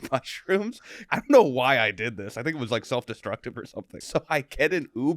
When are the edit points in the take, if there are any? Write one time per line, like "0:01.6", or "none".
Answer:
0:01.0
0:03.9